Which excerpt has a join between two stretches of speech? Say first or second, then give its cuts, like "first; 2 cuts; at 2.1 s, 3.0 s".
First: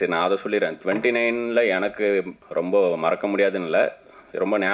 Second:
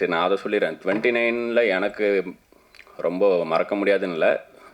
first; 1 cut; at 2.4 s